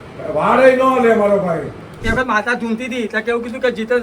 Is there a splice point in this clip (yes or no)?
yes